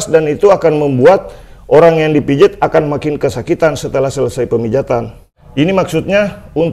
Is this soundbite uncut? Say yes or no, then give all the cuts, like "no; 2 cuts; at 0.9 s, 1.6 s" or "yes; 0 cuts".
no; 1 cut; at 5.4 s